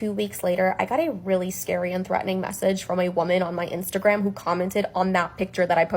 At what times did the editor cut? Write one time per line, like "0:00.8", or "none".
none

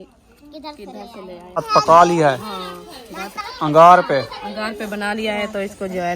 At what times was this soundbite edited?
0:01.5

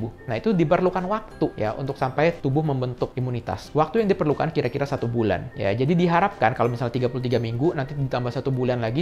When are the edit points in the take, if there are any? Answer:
none

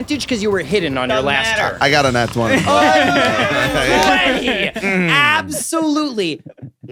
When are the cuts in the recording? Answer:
none

